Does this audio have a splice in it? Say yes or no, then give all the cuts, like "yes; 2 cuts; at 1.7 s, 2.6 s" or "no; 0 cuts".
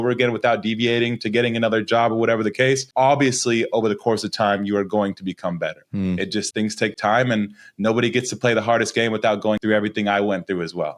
yes; 3 cuts; at 2.9 s, 6.5 s, 9.6 s